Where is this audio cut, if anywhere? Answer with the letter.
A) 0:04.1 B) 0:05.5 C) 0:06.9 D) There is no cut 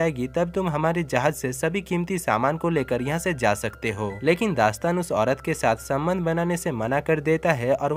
A